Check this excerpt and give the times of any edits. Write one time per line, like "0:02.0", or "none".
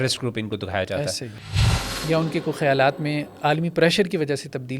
0:01.6